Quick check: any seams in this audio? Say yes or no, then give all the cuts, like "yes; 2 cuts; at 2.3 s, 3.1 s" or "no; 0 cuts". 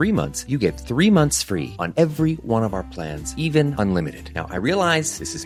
no; 0 cuts